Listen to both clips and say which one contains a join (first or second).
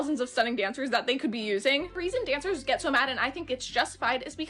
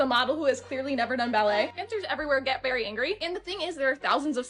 second